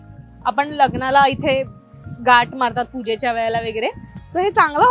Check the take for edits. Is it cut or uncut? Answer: uncut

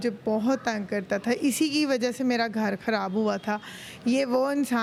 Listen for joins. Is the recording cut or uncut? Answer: uncut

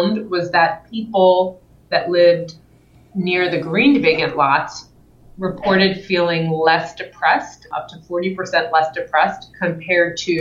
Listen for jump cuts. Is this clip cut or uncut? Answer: cut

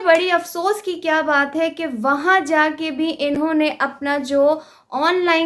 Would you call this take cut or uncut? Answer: uncut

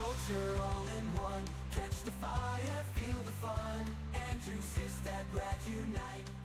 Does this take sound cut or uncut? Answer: uncut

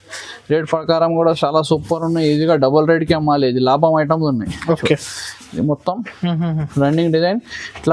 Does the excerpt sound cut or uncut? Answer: uncut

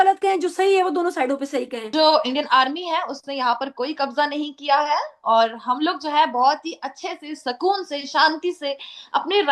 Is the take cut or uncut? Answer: cut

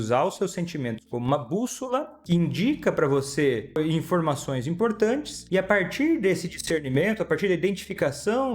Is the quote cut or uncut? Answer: cut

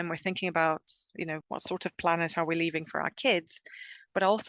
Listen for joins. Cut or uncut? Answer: cut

